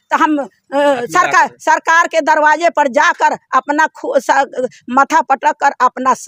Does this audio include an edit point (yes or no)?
no